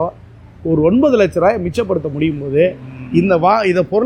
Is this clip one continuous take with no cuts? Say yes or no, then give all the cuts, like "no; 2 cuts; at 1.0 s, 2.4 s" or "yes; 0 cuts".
yes; 0 cuts